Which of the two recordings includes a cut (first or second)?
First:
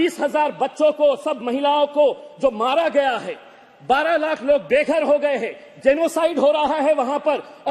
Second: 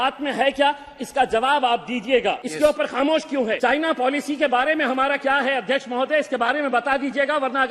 second